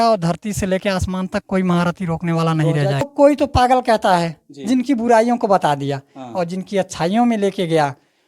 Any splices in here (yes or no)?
yes